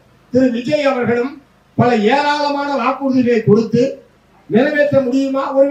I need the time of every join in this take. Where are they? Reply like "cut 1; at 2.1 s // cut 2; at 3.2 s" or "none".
none

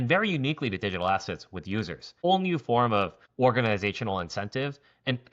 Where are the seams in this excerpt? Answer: cut 1; at 2.2 s // cut 2; at 3.2 s

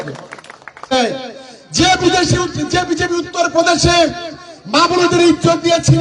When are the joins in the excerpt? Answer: cut 1; at 0.9 s

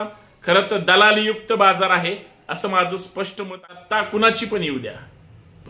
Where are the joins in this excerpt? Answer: cut 1; at 3.4 s

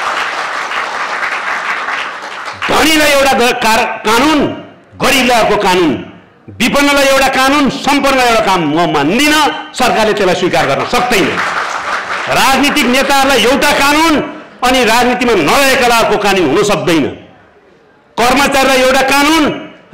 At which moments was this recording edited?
none

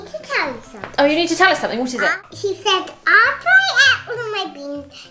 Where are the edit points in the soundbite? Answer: cut 1; at 2.2 s

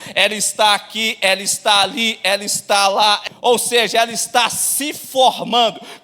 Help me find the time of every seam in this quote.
cut 1; at 3.3 s

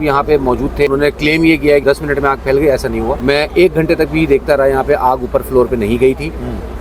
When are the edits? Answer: cut 1; at 0.9 s // cut 2; at 1.8 s // cut 3; at 3.2 s

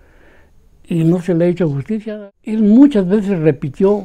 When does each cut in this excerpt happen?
cut 1; at 2.1 s

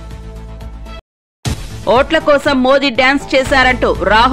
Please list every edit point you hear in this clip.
cut 1; at 1.0 s

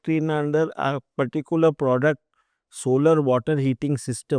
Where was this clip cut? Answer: none

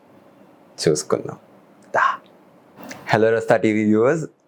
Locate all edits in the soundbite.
none

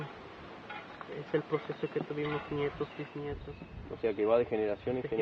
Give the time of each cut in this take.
none

